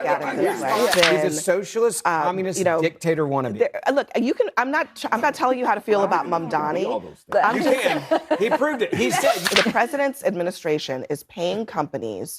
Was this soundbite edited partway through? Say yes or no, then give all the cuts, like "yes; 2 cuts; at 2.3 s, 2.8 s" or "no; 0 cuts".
yes; 2 cuts; at 0.9 s, 9.5 s